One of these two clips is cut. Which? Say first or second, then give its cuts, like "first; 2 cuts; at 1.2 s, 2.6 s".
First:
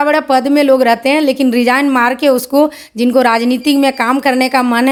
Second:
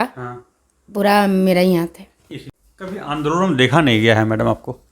second; 1 cut; at 2.4 s